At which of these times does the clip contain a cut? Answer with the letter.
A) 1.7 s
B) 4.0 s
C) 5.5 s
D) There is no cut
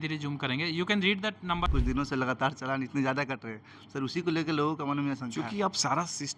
A